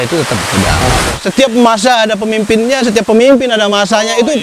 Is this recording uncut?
no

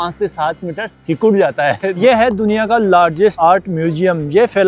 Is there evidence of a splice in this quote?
yes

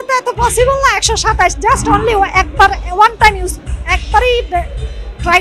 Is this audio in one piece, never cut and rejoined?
yes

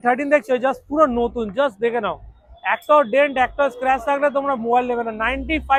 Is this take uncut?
yes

